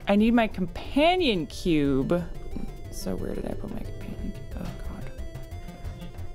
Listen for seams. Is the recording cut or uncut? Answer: cut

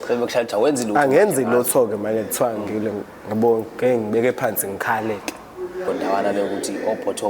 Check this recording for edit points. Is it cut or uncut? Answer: cut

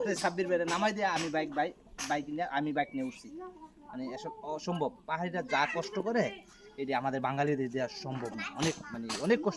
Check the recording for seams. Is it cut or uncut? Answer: uncut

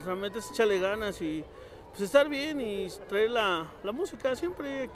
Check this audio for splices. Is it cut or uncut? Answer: uncut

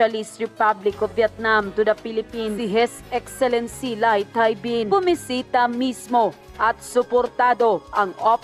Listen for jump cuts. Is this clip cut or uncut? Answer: uncut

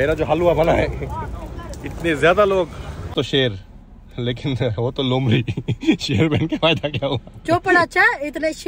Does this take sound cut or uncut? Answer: cut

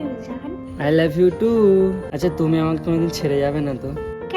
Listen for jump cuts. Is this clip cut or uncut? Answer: cut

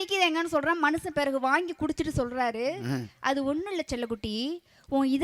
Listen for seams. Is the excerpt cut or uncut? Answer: uncut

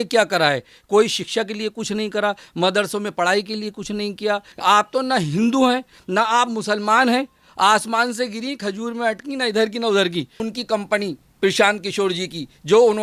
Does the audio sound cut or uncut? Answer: cut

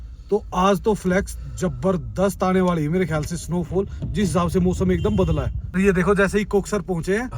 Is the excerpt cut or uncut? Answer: cut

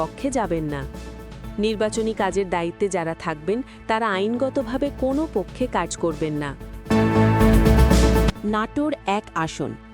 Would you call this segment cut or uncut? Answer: cut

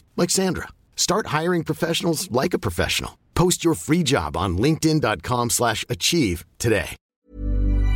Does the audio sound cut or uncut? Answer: cut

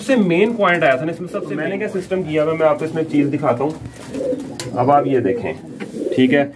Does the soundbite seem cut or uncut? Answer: cut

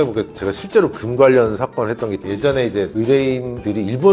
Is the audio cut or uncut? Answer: uncut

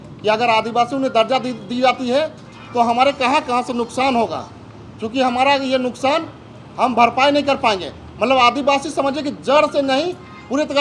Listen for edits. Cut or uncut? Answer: uncut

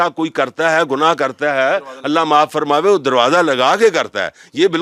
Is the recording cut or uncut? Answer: uncut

